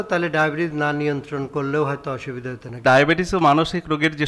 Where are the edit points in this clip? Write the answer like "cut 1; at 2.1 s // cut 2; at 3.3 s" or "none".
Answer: cut 1; at 2.8 s